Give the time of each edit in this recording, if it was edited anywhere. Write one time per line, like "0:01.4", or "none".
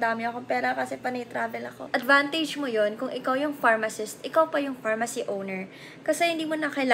0:01.9